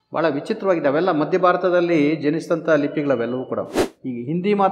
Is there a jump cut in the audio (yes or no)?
yes